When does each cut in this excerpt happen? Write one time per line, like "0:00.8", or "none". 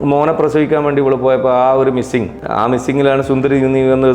0:02.4

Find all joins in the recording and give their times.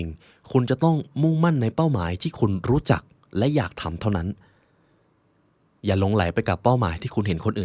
none

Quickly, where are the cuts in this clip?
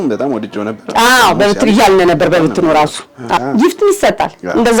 0:03.4

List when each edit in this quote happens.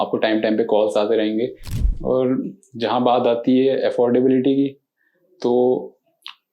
0:01.7

